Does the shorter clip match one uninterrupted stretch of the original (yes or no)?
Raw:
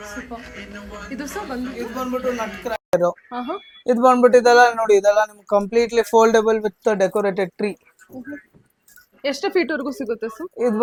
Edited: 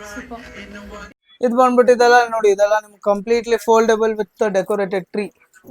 no